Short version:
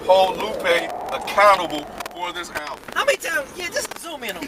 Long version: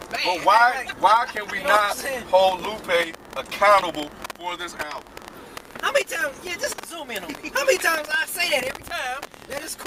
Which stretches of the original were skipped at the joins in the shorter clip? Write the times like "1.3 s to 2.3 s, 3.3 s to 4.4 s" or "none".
5.0 s to 5.7 s